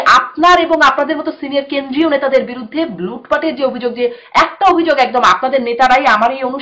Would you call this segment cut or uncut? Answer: uncut